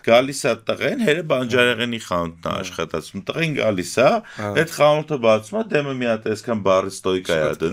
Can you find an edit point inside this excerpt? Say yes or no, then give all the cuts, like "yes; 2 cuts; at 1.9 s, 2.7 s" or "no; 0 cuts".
no; 0 cuts